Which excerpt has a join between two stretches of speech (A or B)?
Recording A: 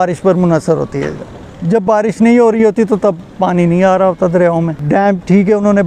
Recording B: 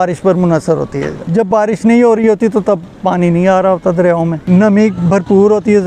B